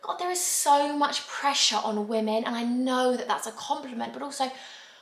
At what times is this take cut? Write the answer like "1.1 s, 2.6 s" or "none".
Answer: none